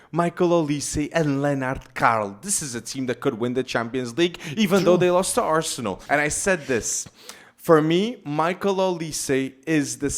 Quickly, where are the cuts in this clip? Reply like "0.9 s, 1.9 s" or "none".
6.0 s